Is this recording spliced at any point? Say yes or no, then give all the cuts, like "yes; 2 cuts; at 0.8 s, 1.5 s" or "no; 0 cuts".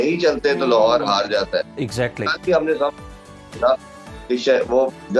no; 0 cuts